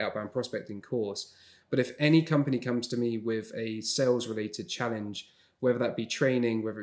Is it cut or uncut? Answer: uncut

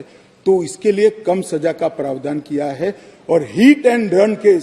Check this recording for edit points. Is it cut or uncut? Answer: uncut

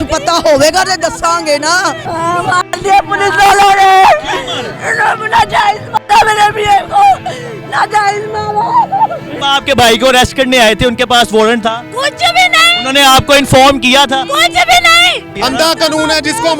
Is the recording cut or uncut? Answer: cut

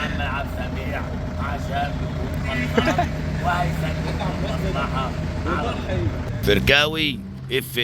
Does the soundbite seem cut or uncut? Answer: cut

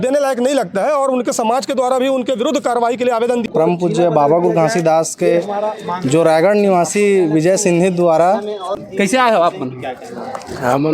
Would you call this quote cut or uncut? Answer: cut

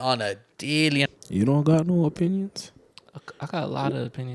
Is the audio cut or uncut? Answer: cut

